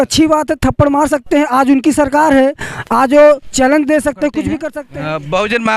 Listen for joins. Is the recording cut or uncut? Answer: cut